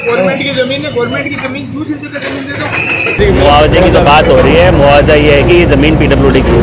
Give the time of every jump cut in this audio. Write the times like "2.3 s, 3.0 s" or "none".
3.2 s